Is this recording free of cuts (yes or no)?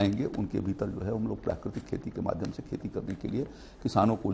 yes